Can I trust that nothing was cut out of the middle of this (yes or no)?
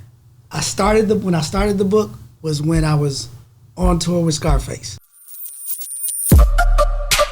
no